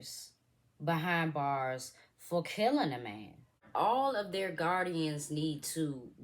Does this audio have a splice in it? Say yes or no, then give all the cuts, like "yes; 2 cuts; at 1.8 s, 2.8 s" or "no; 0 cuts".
yes; 1 cut; at 3.6 s